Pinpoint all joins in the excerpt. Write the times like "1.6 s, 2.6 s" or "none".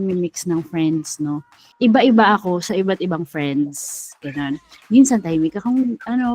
1.6 s